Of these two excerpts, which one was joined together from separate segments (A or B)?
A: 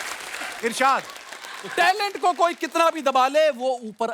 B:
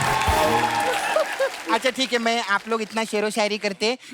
B